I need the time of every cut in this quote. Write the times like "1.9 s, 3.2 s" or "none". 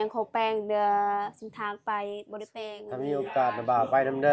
2.6 s